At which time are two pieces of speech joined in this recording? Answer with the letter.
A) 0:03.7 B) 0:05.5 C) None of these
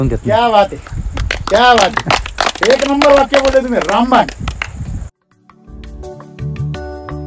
B